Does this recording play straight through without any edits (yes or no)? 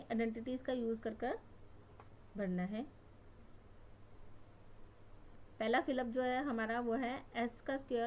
no